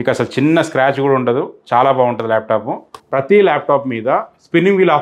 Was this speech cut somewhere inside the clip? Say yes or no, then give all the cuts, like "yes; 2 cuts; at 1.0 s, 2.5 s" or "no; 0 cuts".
yes; 1 cut; at 3.0 s